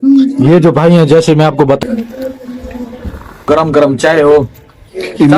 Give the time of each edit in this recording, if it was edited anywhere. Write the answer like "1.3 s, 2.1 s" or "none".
1.8 s, 3.5 s